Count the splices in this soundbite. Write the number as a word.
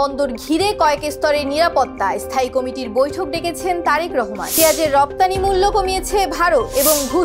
zero